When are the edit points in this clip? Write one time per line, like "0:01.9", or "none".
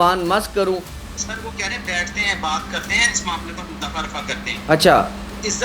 0:00.9